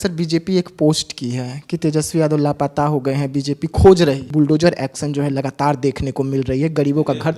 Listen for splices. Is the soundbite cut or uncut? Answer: cut